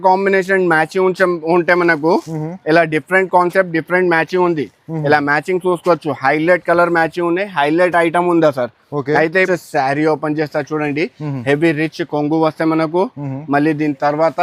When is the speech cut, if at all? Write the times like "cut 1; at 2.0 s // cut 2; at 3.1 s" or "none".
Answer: cut 1; at 9.5 s

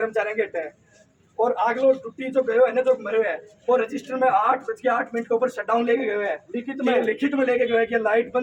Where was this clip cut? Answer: none

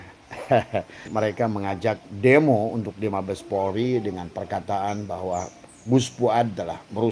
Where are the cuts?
cut 1; at 1.1 s

